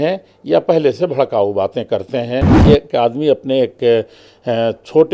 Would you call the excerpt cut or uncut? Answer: cut